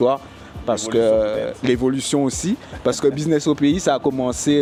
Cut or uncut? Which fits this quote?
uncut